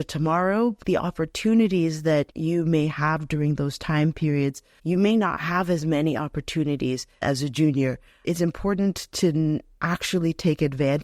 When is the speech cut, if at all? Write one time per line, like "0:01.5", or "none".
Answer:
0:00.8
0:02.3
0:04.7
0:07.2
0:08.2
0:09.7